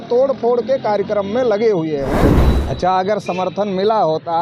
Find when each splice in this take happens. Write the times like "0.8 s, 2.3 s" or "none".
2.5 s